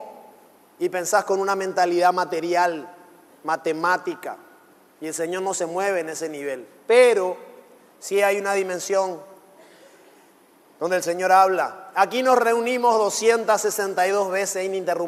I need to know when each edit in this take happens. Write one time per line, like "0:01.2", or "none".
none